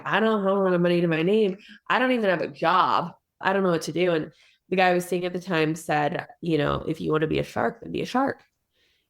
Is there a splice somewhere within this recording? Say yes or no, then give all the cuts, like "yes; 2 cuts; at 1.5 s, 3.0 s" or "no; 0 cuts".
yes; 1 cut; at 3.4 s